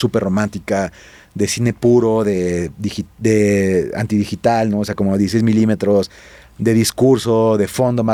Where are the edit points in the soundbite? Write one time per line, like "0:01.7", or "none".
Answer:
none